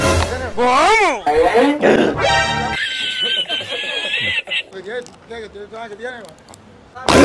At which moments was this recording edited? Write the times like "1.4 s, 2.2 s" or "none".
none